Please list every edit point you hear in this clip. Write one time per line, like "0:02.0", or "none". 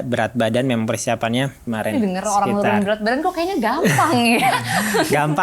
0:01.6